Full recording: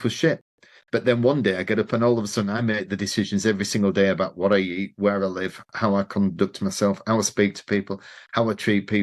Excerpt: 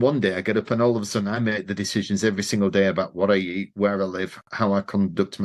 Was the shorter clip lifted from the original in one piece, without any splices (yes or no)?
yes